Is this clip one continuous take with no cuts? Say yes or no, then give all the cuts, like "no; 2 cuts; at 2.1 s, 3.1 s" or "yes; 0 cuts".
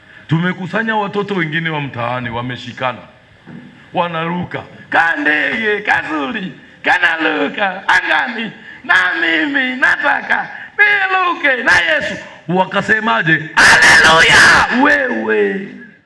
yes; 0 cuts